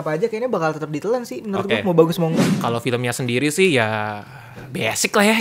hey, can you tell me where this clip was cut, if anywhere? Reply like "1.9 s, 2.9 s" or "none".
2.6 s